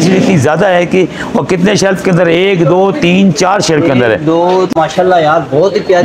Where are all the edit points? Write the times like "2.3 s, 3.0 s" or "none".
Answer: 4.7 s